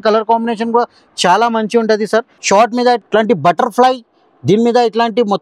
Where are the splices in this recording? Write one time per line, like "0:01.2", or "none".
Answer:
0:02.4
0:03.0